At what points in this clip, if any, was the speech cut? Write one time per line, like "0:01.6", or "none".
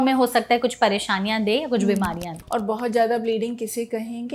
0:02.3